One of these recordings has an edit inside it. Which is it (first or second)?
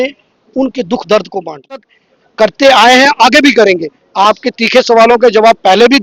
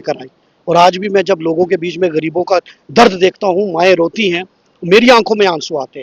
first